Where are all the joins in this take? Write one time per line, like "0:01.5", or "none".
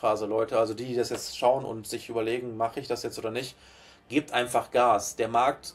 none